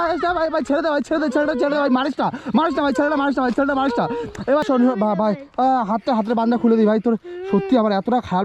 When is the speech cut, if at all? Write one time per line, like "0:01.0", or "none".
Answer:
0:04.6